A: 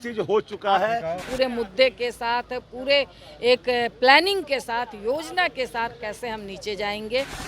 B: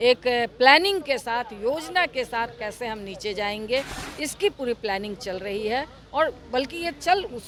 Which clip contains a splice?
A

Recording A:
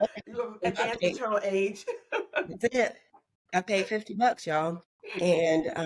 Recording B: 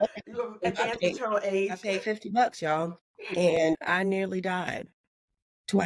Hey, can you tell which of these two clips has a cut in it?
B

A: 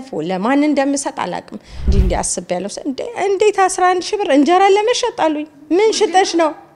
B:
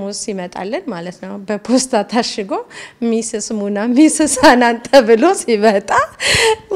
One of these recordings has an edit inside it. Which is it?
A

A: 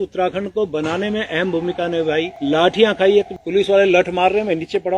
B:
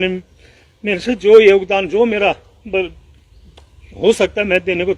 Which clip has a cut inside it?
A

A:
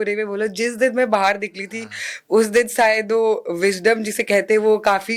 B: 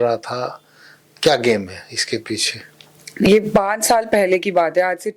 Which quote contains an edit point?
B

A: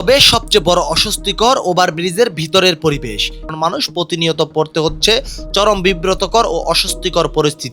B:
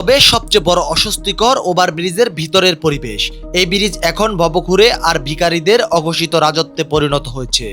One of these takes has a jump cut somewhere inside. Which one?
A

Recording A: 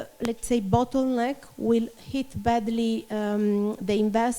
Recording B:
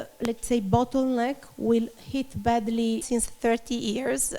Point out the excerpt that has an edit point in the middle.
B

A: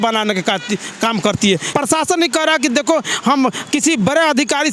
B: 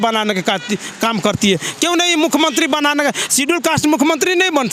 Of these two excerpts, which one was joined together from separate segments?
A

